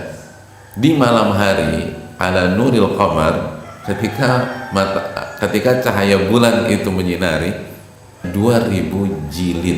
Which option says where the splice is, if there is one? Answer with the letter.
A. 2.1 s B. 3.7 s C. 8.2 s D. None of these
C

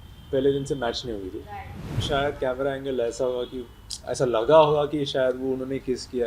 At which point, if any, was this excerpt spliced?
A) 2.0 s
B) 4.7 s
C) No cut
A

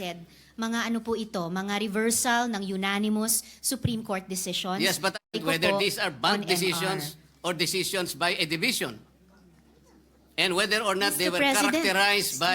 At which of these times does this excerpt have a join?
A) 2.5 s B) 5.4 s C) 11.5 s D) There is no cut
B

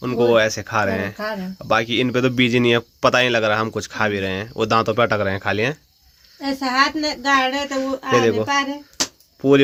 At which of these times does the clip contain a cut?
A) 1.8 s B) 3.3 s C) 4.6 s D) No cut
D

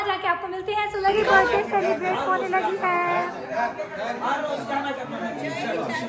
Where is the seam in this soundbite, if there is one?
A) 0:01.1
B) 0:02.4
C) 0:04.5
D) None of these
A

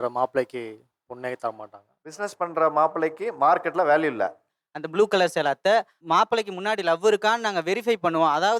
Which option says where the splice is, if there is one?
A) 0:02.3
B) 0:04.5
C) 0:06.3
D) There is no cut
B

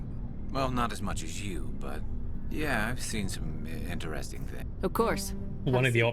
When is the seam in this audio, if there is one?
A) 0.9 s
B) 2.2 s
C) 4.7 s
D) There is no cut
C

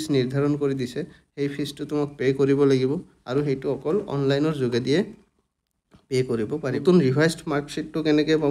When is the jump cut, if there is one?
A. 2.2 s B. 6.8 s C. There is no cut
B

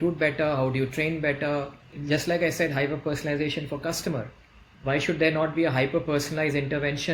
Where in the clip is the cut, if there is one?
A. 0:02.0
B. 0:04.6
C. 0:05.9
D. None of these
A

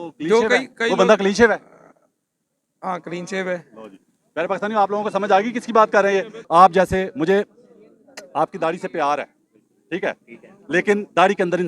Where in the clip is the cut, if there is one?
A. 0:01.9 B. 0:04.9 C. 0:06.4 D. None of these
C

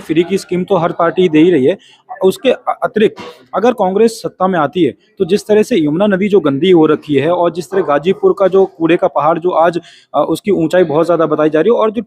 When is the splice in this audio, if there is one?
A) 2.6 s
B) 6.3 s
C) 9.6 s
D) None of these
D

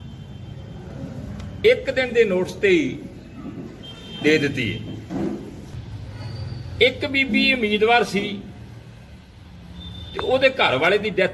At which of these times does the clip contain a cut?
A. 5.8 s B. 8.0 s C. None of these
A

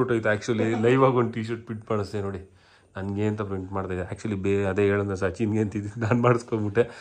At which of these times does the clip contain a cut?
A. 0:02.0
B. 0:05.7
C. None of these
C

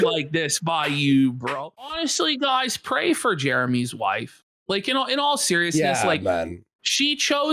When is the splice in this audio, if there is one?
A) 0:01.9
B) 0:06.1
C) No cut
A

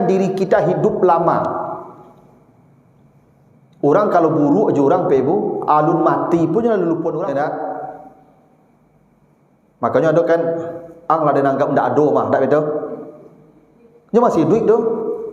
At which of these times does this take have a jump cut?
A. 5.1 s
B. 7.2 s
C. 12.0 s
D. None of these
B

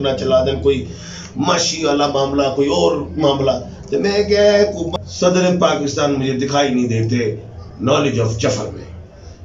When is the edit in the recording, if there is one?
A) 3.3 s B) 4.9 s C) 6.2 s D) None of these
B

